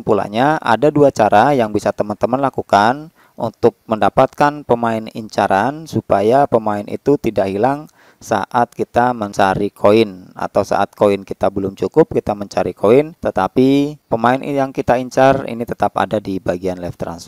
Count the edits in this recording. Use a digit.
3